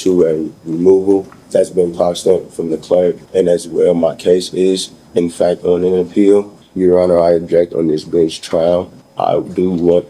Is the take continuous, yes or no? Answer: no